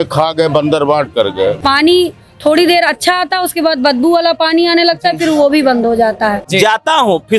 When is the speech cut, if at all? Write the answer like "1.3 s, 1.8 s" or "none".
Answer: 1.6 s, 6.4 s